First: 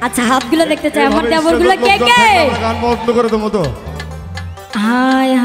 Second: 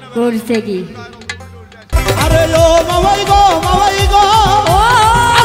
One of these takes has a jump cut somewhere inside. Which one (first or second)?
second